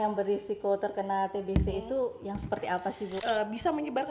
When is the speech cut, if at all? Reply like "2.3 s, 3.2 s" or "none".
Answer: 3.2 s